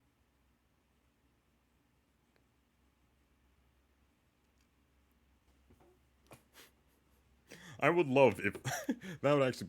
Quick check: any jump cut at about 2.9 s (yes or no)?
no